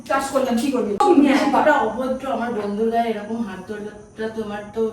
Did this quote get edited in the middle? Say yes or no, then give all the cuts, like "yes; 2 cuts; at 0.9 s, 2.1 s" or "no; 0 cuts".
yes; 1 cut; at 1.0 s